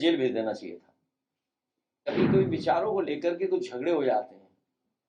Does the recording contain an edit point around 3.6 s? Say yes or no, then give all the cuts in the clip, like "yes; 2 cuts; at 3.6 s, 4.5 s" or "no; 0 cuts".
no; 1 cut; at 2.0 s